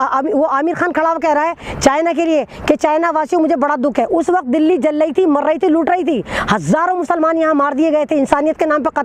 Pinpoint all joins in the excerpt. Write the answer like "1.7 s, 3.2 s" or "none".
none